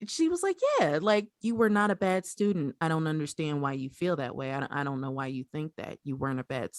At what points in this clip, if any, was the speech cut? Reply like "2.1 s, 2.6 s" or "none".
1.3 s, 2.7 s